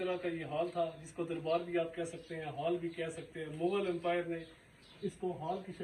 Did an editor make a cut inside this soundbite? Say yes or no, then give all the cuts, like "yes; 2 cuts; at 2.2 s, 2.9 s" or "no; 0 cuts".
no; 0 cuts